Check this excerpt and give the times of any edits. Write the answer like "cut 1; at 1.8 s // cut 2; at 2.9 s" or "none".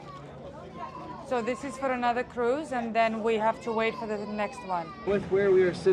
cut 1; at 4.9 s